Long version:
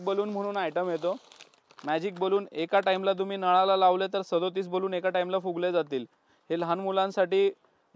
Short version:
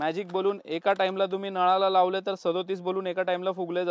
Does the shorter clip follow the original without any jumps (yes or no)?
yes